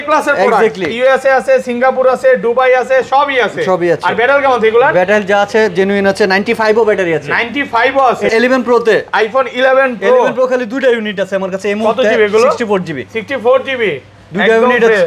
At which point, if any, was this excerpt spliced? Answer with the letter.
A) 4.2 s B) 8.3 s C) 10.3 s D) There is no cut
B